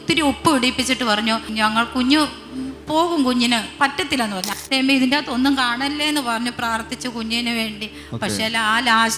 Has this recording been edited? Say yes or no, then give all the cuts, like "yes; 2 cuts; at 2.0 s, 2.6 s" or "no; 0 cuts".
yes; 2 cuts; at 1.5 s, 4.4 s